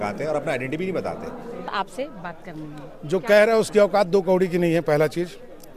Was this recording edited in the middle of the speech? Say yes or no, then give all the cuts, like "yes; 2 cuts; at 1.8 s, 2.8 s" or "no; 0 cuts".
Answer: yes; 1 cut; at 1.7 s